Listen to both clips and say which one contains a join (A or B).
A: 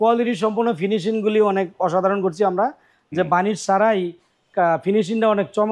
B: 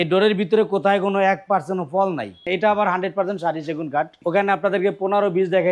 B